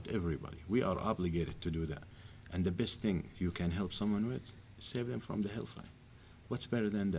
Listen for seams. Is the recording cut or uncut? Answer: uncut